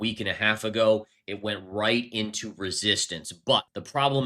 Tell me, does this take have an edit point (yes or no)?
no